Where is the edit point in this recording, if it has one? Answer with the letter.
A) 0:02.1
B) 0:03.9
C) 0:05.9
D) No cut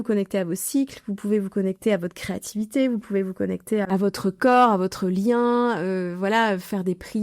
B